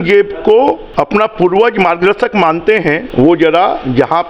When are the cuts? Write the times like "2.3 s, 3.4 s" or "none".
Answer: 0.8 s, 3.0 s